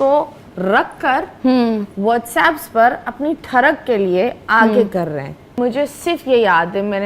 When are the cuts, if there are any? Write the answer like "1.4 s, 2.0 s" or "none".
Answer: 5.6 s